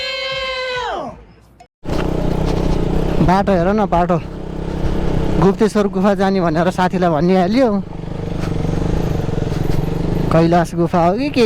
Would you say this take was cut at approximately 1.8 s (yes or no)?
yes